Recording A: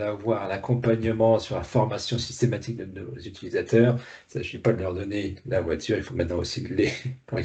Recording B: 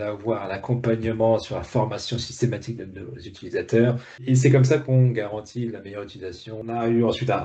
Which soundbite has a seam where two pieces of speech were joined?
B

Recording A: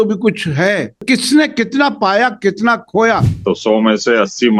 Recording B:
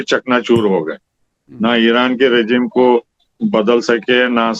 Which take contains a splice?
A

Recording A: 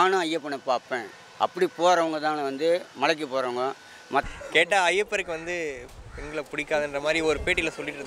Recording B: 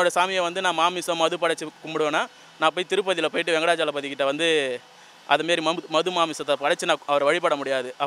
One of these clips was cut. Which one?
A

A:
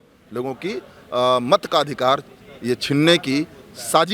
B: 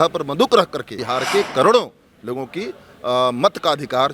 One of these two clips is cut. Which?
B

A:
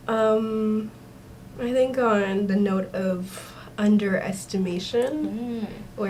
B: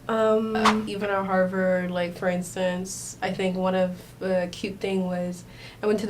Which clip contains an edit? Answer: B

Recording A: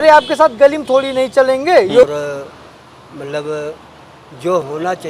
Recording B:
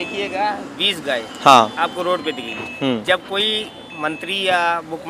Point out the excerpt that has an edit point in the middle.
A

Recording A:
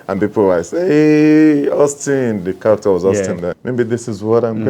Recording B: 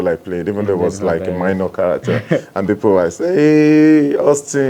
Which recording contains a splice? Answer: A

